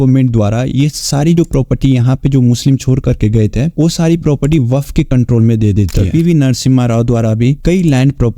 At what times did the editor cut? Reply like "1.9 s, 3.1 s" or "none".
6.0 s